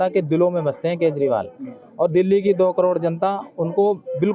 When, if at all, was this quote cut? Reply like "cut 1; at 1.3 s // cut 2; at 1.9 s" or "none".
none